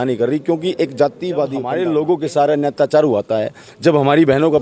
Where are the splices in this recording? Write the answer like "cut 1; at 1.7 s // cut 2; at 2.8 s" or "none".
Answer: cut 1; at 1.6 s